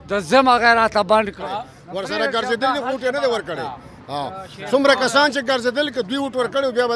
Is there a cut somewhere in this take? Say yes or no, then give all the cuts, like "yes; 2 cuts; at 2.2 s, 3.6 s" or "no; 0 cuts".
yes; 1 cut; at 1.4 s